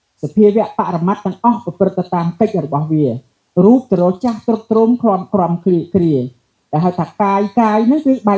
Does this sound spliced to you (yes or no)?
no